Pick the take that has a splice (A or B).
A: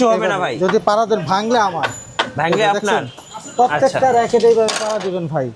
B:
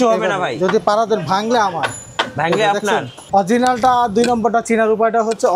B